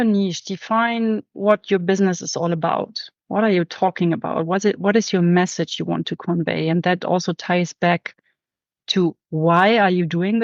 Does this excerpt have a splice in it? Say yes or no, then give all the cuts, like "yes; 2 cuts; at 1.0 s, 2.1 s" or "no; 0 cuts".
no; 0 cuts